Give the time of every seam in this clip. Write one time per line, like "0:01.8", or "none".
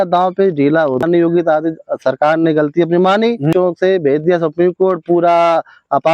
0:01.0
0:03.5